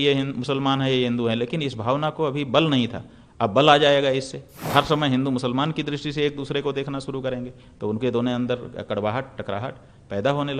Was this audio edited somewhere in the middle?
yes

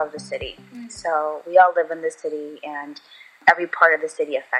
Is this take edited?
yes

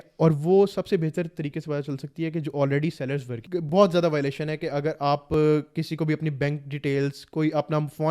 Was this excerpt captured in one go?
no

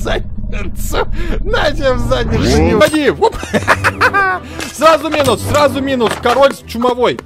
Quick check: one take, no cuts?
no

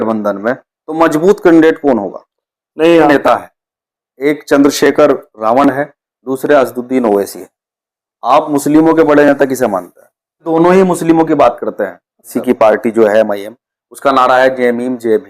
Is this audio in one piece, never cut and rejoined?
no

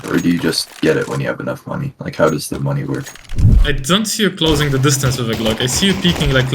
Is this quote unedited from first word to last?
no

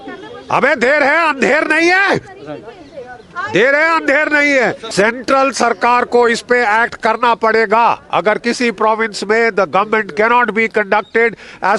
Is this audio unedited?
no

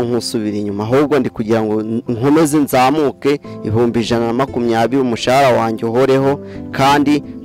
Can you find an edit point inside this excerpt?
no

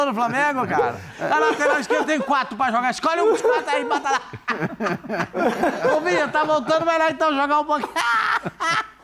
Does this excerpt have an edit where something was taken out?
no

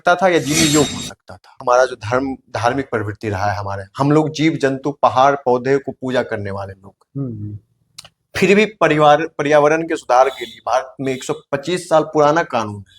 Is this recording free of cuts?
no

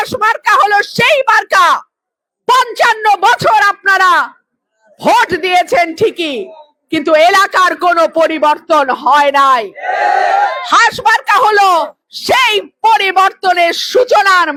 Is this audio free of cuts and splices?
yes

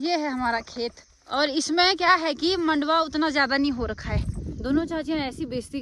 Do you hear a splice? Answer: yes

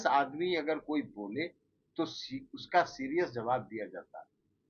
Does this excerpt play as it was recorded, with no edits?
yes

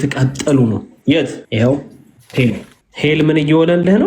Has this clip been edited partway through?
yes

